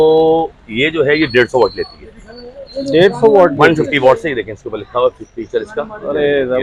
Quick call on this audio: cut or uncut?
uncut